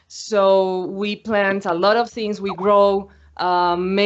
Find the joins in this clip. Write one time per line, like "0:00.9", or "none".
0:02.0